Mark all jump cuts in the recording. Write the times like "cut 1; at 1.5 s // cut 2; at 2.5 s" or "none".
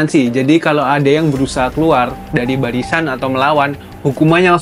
none